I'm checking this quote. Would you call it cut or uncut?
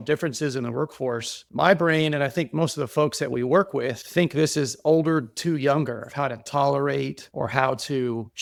uncut